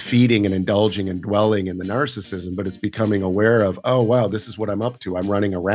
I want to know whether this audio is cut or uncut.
uncut